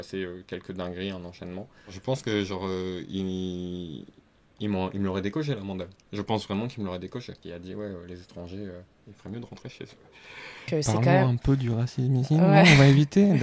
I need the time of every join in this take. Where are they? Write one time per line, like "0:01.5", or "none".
0:01.9
0:07.4
0:10.6

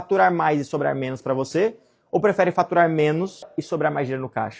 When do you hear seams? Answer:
0:03.5

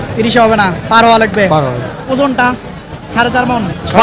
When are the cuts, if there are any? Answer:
none

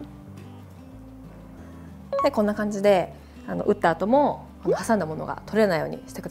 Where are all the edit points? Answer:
none

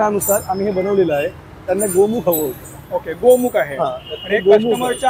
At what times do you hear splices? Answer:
none

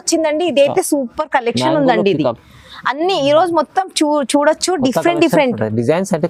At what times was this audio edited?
none

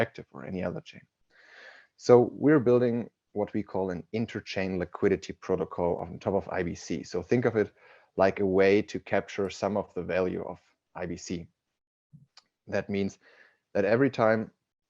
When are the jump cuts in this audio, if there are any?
0:06.0

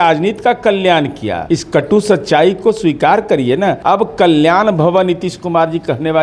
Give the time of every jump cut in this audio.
0:01.3
0:03.8

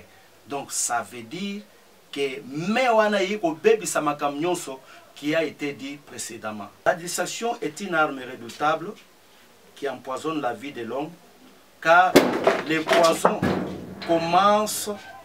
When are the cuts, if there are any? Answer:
0:06.9

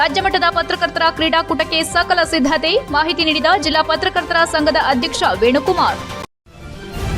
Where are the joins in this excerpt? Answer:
0:06.1

